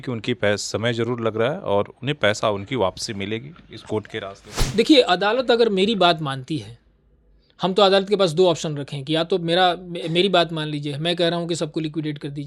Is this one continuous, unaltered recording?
yes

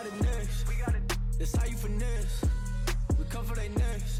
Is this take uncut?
yes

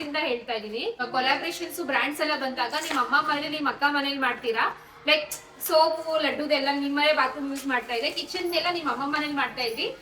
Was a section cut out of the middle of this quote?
yes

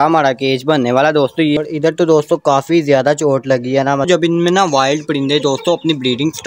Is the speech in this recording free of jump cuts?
no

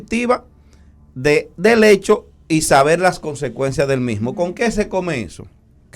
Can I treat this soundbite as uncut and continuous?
yes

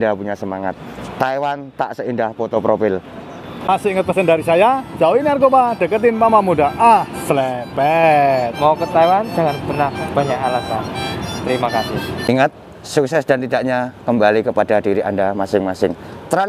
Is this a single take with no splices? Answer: yes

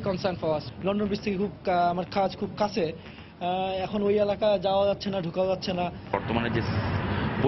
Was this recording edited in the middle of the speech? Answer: yes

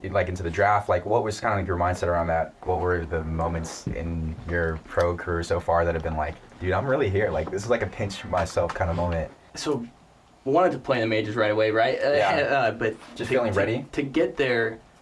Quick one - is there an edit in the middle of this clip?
yes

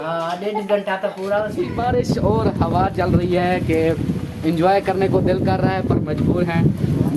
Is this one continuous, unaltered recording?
no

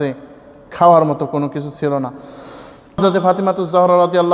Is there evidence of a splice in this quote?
yes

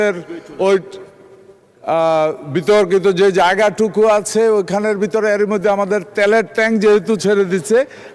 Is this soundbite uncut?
yes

